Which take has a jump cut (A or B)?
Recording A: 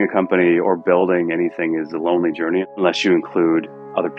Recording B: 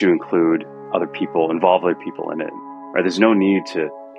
B